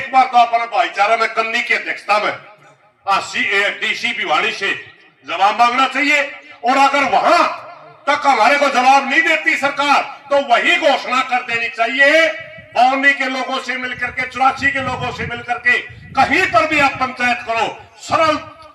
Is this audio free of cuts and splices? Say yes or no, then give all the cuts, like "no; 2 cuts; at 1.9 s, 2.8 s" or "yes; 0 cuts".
yes; 0 cuts